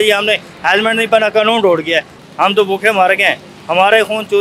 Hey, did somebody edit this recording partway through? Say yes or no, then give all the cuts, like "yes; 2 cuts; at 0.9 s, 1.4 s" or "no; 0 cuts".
yes; 1 cut; at 2.2 s